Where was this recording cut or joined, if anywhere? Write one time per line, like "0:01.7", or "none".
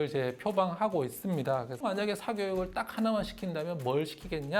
0:01.9